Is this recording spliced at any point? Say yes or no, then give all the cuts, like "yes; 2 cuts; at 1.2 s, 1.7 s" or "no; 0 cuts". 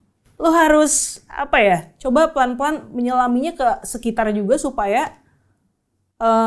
no; 0 cuts